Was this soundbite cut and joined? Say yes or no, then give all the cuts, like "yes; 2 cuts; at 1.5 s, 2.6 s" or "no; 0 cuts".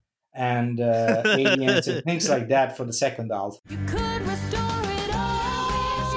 yes; 1 cut; at 3.6 s